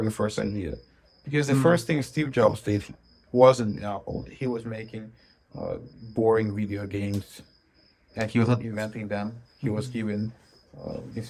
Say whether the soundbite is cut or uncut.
uncut